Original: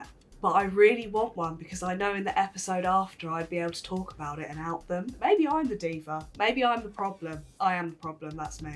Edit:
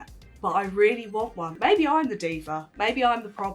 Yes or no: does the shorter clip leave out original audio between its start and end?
yes